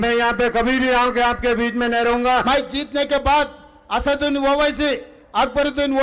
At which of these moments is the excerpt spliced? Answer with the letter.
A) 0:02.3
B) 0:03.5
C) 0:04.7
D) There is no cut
A